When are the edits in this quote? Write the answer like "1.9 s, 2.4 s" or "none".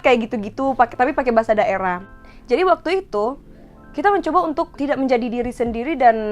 2.1 s, 4.8 s